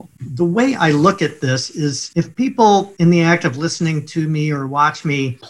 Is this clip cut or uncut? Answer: uncut